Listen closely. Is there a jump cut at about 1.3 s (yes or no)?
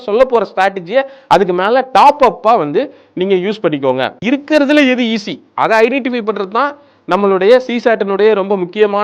no